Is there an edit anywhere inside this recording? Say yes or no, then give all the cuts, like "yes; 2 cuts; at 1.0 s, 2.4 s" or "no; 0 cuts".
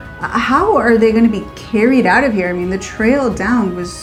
no; 0 cuts